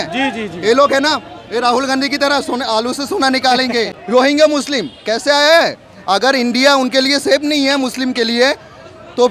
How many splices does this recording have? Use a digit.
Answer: 1